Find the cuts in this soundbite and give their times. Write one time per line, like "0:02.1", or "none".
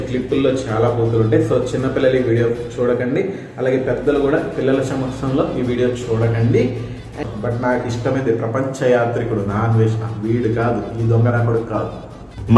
0:07.2